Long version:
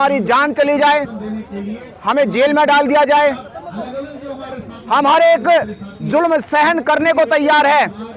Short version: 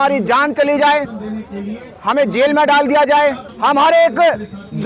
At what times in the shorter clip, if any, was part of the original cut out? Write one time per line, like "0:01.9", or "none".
0:03.5